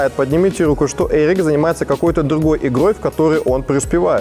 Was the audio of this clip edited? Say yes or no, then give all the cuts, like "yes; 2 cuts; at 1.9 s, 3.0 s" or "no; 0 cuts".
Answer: no; 0 cuts